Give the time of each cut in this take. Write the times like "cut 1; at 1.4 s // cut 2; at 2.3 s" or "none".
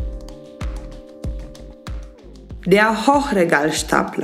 cut 1; at 2.5 s

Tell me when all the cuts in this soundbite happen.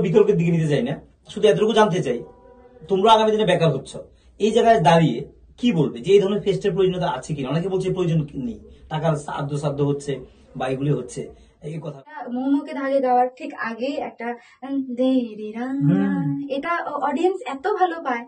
cut 1; at 12.2 s

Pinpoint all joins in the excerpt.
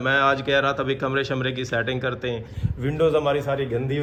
none

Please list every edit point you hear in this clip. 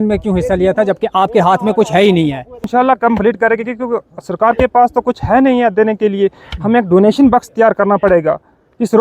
cut 1; at 2.7 s

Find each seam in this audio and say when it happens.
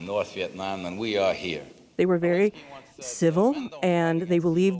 none

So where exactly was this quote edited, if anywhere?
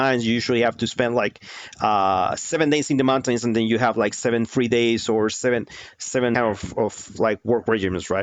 cut 1; at 6.3 s

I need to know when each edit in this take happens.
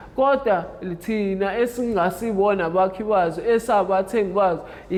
none

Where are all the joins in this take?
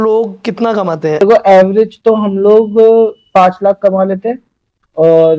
cut 1; at 1.2 s

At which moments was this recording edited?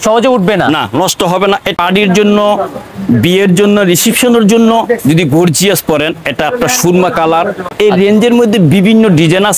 cut 1; at 1.7 s // cut 2; at 7.7 s

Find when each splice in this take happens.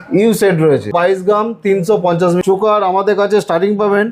cut 1; at 0.9 s // cut 2; at 2.4 s

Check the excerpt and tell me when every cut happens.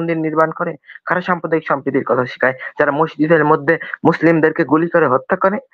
none

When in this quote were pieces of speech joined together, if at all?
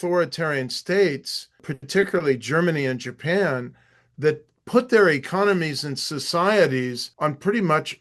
cut 1; at 1.7 s // cut 2; at 7.0 s

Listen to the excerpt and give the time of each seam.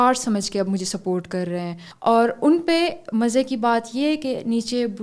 cut 1; at 1.9 s

